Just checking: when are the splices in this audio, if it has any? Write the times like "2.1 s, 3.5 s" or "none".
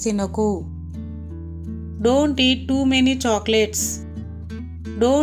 none